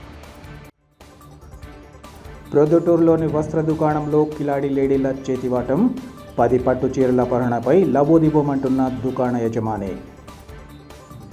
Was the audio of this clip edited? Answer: no; 0 cuts

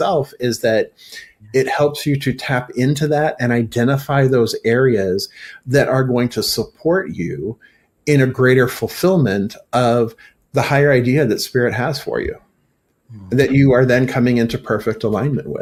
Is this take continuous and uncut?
yes; 0 cuts

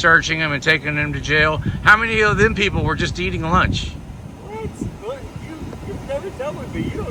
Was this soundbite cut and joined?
no; 0 cuts

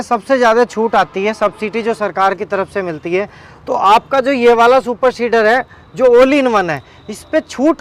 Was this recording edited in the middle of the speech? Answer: no; 0 cuts

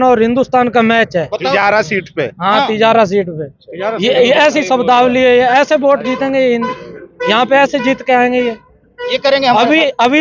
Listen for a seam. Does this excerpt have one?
no; 0 cuts

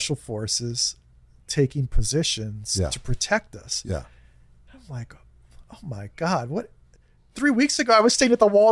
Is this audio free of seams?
yes; 0 cuts

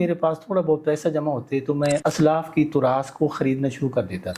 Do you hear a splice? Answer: yes; 1 cut; at 2.0 s

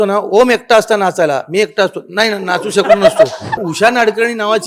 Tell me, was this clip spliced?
yes; 1 cut; at 3.7 s

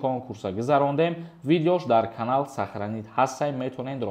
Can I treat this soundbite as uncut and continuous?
yes; 0 cuts

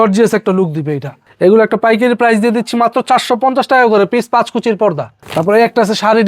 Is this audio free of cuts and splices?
no; 2 cuts; at 1.2 s, 5.2 s

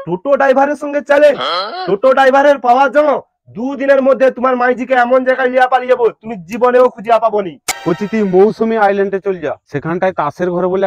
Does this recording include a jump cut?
yes; 1 cut; at 7.7 s

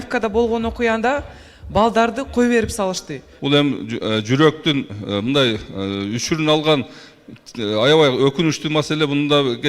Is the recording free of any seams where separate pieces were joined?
no; 1 cut; at 3.2 s

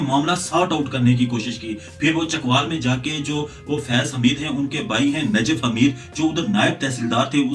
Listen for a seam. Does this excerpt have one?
no; 0 cuts

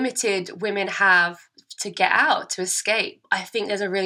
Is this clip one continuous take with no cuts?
no; 1 cut; at 3.2 s

